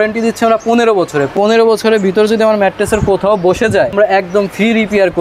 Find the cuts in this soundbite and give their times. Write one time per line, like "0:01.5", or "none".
0:01.3
0:03.9

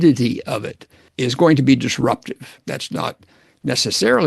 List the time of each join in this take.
0:01.0
0:02.6

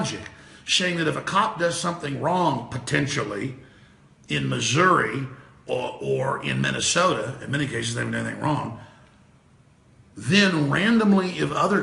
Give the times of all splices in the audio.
0:04.6

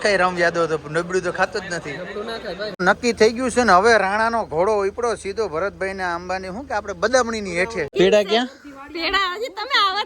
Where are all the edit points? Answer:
0:02.8
0:07.9

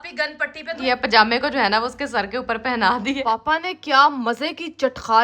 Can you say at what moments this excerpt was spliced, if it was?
0:00.8
0:03.2

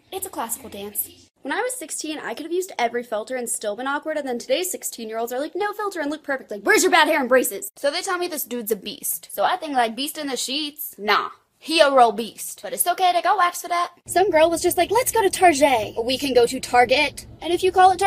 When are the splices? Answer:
0:01.3
0:07.8
0:14.0

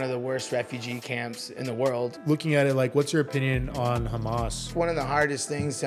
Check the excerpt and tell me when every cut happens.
0:02.2
0:04.7

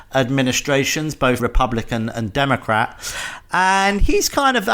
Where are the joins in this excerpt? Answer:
0:01.4

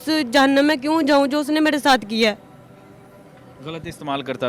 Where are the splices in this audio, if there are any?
none

